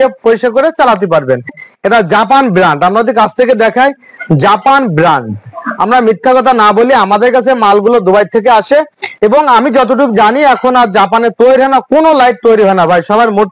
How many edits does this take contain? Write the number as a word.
one